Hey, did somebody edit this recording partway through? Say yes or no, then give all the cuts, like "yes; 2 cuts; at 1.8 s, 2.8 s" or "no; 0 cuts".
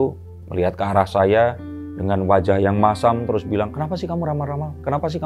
no; 0 cuts